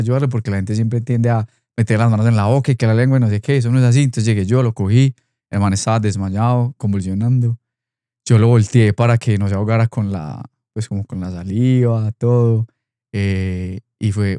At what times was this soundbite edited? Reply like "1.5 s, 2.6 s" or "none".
none